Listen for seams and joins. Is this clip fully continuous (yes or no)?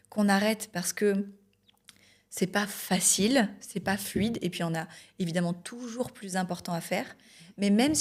yes